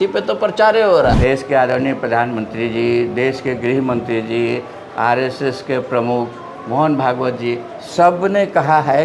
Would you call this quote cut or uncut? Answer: cut